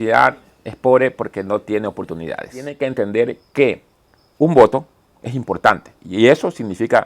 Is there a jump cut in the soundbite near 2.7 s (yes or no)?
yes